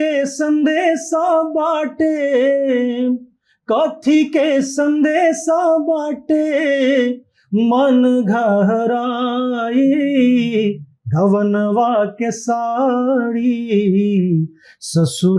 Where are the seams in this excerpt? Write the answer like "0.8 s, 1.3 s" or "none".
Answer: none